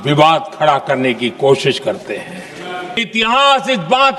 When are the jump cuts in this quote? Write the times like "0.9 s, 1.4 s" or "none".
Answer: 3.0 s

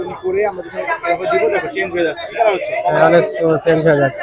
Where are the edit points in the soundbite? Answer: none

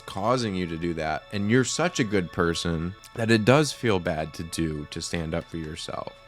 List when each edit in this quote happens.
3.0 s

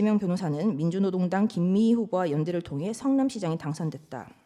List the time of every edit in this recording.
none

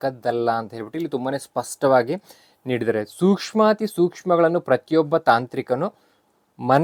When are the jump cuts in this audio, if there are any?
none

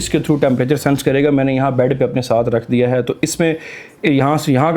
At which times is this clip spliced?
none

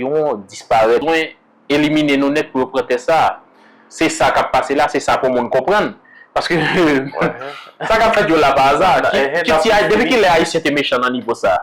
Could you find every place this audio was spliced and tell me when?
1.0 s

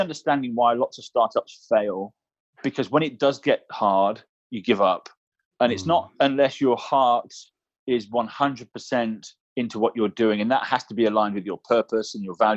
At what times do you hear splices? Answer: 2.5 s

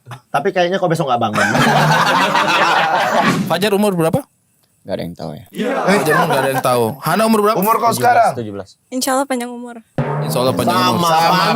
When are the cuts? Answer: 3.3 s

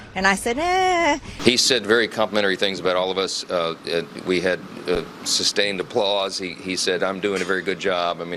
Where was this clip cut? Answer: 1.3 s

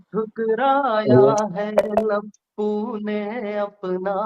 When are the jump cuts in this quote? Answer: none

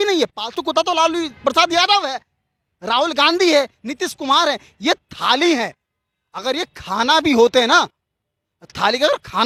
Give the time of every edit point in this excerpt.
none

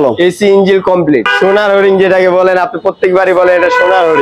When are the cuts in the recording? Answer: 1.3 s

